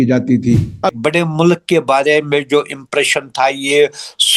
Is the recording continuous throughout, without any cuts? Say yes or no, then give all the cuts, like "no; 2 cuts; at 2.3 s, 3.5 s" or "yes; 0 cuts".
no; 1 cut; at 0.9 s